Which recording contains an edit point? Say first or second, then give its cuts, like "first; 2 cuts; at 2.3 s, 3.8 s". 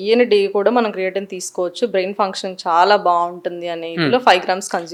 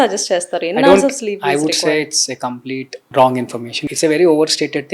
second; 2 cuts; at 3.0 s, 3.8 s